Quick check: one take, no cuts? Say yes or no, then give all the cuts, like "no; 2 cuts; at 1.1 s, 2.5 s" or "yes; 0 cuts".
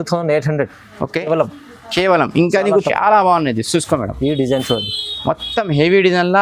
no; 1 cut; at 2.9 s